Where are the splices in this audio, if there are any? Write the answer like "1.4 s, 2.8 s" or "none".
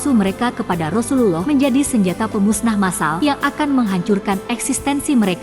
1.4 s, 3.1 s